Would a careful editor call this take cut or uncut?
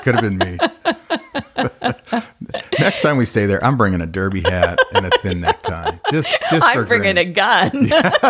uncut